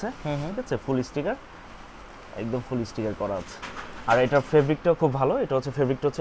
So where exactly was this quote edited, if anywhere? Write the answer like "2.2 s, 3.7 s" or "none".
none